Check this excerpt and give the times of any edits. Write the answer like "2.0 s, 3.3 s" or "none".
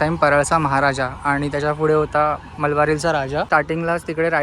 3.5 s